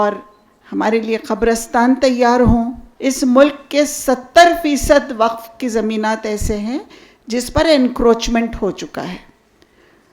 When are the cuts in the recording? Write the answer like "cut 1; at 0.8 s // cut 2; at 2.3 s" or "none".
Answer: cut 1; at 2.8 s